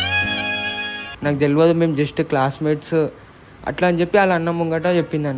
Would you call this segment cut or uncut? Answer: cut